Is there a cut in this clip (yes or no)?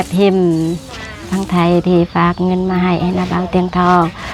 no